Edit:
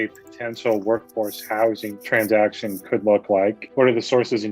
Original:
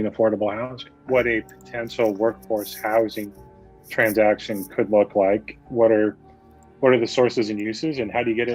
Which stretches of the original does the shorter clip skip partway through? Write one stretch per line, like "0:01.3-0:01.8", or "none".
0:03.3-0:03.8
0:05.5-0:06.7